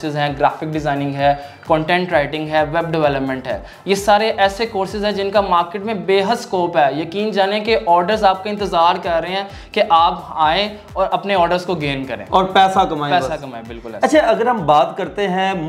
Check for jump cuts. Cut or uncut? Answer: uncut